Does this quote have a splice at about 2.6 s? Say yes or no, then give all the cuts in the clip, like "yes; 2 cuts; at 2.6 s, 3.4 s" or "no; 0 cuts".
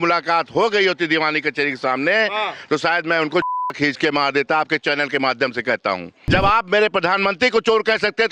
no; 1 cut; at 6.1 s